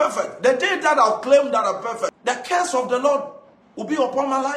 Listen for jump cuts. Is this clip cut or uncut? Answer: cut